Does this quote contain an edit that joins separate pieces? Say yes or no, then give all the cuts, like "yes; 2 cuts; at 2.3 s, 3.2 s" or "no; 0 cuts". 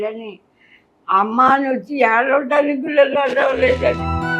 no; 0 cuts